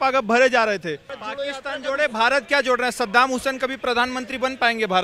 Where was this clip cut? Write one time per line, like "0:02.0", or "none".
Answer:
0:01.1